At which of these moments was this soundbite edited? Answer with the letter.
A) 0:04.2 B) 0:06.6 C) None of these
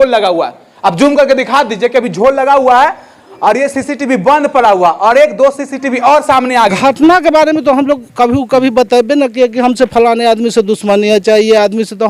B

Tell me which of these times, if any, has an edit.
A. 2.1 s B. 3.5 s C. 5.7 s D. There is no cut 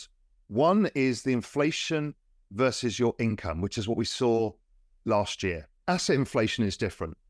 C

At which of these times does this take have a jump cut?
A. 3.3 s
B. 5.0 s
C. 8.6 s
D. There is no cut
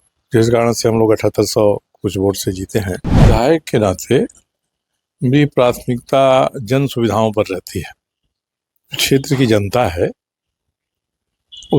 A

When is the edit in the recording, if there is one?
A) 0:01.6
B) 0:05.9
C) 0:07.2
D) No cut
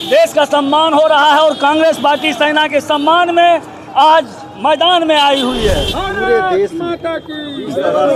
B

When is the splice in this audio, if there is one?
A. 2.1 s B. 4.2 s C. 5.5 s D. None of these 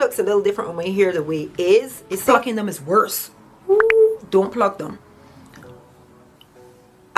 A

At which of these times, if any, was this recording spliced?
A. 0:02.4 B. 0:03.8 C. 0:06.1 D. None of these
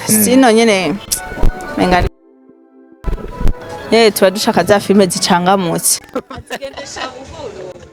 D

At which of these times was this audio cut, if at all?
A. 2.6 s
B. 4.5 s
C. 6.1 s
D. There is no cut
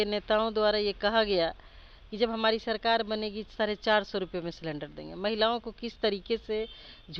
D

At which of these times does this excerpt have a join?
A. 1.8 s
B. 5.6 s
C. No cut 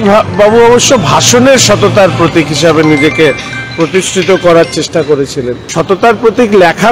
B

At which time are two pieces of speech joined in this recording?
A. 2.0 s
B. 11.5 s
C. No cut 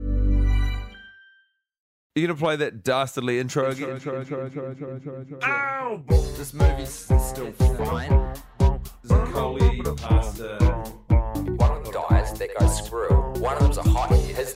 A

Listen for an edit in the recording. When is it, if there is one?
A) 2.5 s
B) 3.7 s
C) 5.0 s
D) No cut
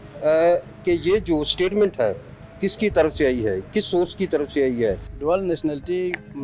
C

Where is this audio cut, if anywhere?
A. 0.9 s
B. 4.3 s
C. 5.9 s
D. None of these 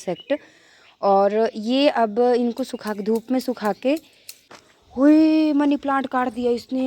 B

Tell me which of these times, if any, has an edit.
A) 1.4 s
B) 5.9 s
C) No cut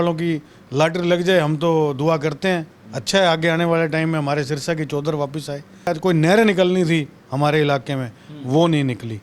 B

